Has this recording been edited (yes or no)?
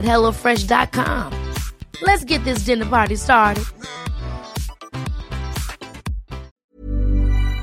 yes